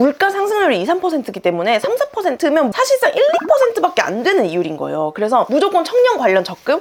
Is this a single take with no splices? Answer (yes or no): yes